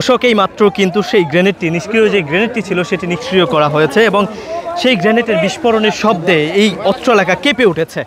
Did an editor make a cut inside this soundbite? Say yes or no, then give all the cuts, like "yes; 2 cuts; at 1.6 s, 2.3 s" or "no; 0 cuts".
no; 0 cuts